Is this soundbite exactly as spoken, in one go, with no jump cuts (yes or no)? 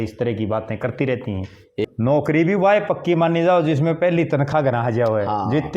no